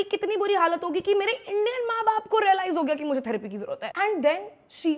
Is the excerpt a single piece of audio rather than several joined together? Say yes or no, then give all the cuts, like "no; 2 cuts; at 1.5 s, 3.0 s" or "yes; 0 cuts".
no; 1 cut; at 3.8 s